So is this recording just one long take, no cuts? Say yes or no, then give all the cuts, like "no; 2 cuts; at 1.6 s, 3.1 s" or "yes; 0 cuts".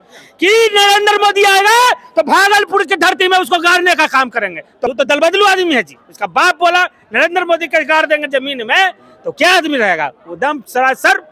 no; 1 cut; at 4.7 s